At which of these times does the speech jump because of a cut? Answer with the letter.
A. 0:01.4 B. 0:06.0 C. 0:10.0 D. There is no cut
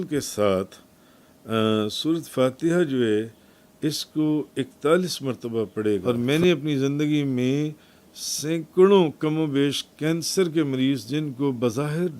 B